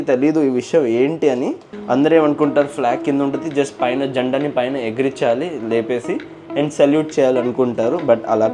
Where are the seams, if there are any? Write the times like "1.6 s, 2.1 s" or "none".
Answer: 1.7 s